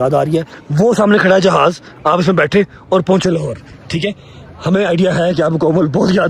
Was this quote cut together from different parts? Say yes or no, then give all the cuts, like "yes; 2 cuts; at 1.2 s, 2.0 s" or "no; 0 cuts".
no; 0 cuts